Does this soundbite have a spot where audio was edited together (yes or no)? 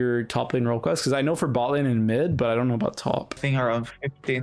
yes